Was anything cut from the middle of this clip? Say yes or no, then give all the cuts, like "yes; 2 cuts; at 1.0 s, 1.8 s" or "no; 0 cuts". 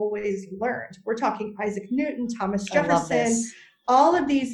no; 0 cuts